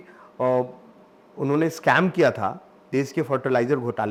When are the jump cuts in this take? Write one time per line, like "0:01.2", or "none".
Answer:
none